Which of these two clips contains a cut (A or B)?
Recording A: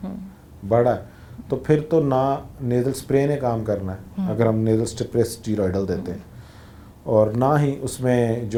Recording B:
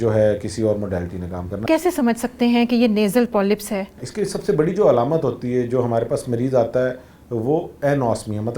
B